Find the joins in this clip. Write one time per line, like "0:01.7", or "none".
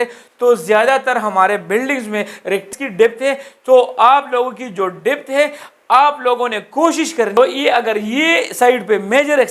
0:02.7
0:07.3